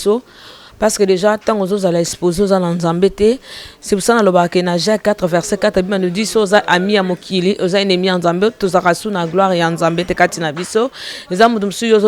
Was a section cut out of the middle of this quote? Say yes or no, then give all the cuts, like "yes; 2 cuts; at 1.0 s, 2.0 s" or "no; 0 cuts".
no; 0 cuts